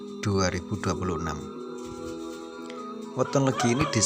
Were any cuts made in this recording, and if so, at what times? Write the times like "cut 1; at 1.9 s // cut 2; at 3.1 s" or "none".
cut 1; at 1.0 s // cut 2; at 3.0 s